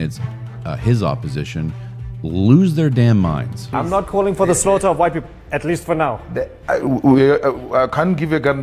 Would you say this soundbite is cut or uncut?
cut